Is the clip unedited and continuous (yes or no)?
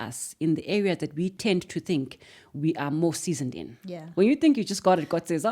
no